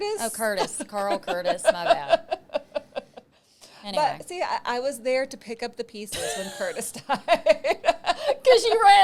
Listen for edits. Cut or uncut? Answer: uncut